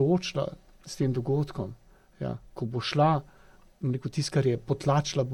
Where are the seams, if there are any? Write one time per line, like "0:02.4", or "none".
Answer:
none